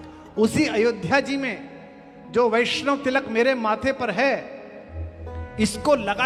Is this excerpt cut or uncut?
uncut